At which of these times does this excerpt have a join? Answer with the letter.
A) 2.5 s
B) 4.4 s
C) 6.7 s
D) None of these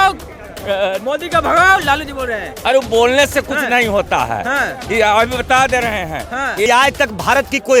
C